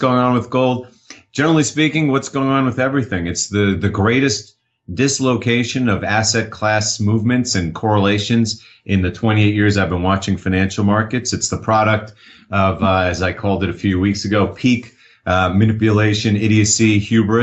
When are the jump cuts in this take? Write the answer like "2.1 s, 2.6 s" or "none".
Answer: none